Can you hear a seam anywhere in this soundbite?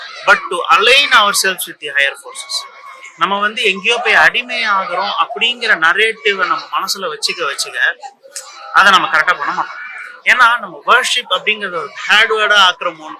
no; 0 cuts

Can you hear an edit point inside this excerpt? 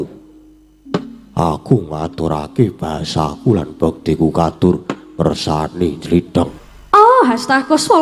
yes; 1 cut; at 6.6 s

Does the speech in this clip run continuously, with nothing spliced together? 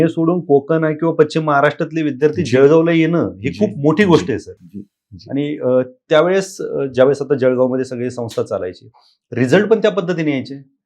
yes; 0 cuts

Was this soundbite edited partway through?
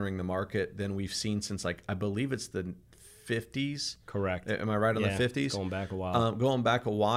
no; 0 cuts

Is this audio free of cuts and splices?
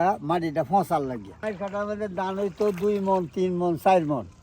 no; 1 cut; at 1.3 s

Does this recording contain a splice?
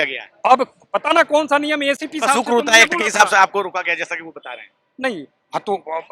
no; 0 cuts

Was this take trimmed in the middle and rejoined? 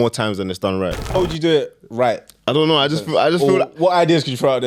yes; 1 cut; at 1.2 s

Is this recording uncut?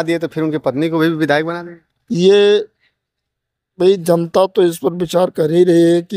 yes; 0 cuts

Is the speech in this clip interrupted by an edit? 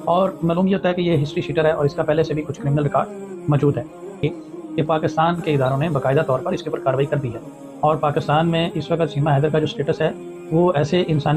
yes; 1 cut; at 4.2 s

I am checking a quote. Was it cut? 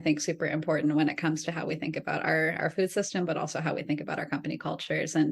no; 0 cuts

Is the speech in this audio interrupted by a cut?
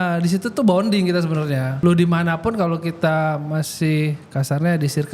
yes; 1 cut; at 1.7 s

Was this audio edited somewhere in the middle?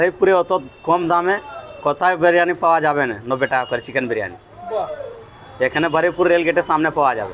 no; 0 cuts

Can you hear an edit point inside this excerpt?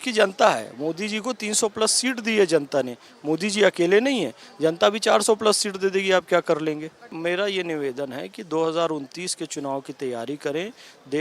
yes; 1 cut; at 7.1 s

